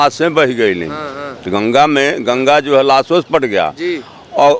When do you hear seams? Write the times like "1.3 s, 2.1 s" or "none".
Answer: none